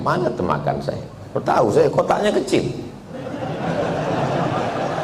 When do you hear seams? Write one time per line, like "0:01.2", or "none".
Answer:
none